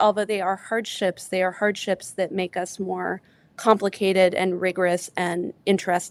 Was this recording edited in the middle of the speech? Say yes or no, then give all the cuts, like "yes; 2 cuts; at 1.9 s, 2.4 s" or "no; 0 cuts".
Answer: no; 0 cuts